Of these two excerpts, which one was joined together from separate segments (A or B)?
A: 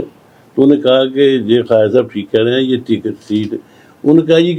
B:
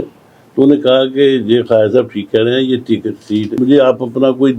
B